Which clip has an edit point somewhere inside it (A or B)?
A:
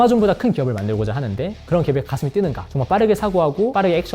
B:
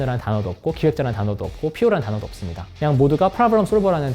A